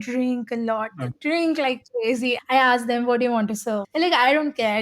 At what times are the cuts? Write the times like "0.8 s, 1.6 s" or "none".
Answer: 2.4 s, 3.8 s